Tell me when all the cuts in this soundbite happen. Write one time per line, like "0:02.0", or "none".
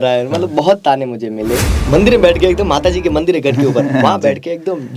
0:01.7